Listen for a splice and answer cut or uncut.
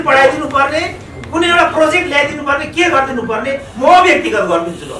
uncut